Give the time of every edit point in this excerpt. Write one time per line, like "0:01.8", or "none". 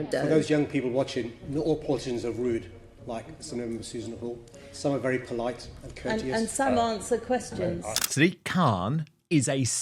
0:08.0